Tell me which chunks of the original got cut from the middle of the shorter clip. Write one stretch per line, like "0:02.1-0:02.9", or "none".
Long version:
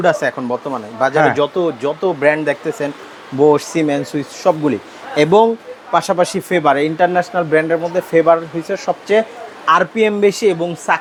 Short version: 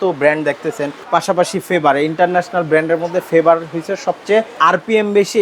0:02.9-0:05.7
0:09.3-0:09.6